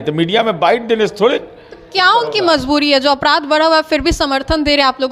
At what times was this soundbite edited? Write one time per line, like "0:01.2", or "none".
none

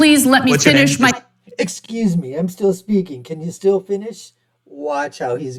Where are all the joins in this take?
none

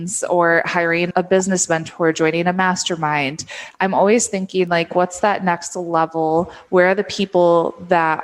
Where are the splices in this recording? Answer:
0:01.1

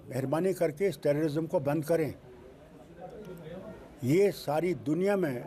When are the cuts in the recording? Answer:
none

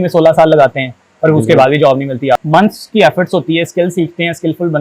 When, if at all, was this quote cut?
0:02.4

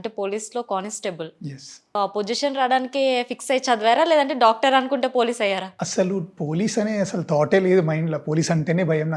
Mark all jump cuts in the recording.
0:01.9

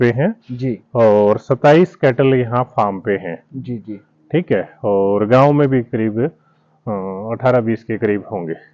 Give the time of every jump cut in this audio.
none

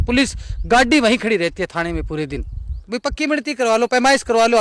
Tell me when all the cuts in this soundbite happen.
0:02.8

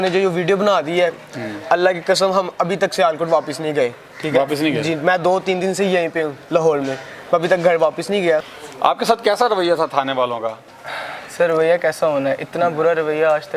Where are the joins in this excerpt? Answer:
none

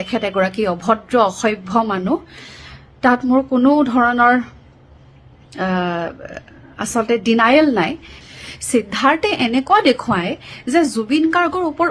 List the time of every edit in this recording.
0:08.1

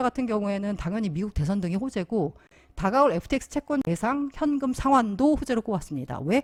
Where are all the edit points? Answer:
none

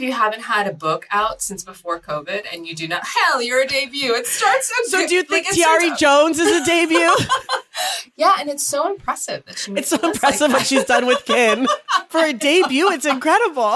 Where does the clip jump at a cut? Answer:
0:12.1

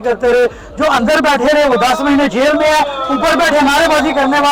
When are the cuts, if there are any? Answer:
none

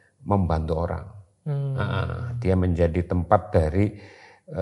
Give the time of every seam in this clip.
none

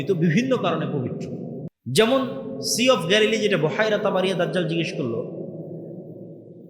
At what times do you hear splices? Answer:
0:01.7

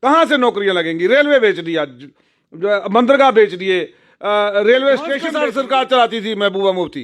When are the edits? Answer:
0:05.3

